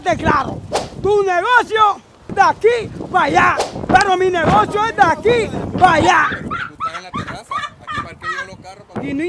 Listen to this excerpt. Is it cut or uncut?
uncut